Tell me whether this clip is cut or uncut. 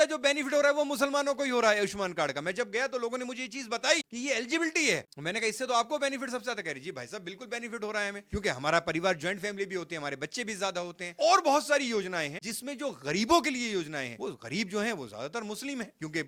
uncut